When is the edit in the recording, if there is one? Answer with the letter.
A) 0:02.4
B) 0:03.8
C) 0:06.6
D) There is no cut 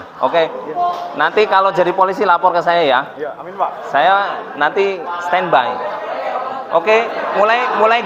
D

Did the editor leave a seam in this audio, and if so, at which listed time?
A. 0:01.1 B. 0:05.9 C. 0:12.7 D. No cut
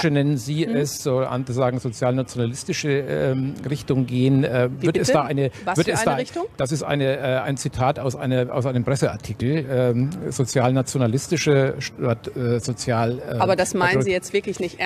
C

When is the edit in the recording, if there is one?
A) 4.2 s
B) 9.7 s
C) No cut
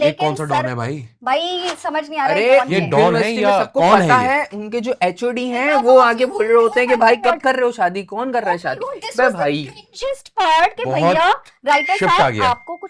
C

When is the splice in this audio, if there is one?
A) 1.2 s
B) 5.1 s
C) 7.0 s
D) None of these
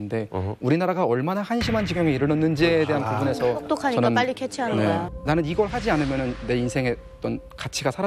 B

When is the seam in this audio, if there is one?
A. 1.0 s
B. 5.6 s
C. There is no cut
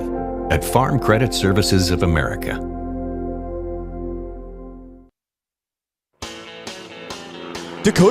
B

